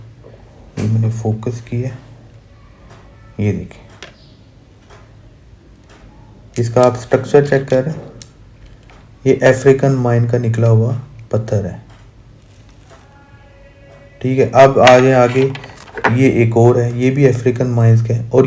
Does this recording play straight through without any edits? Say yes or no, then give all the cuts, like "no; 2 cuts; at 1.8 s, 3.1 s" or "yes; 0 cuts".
yes; 0 cuts